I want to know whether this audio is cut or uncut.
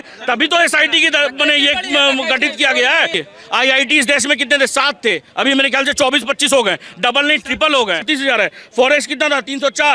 cut